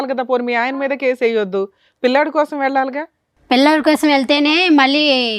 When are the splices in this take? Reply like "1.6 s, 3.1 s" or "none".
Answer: none